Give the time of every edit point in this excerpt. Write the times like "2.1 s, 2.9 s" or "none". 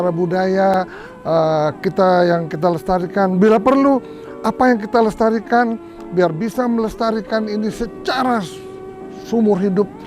none